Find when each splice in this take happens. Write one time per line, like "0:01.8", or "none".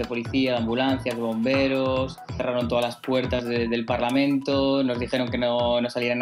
none